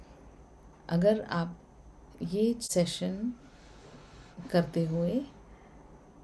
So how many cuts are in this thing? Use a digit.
1